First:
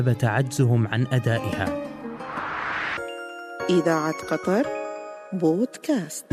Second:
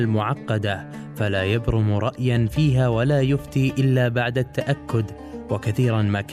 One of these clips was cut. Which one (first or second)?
first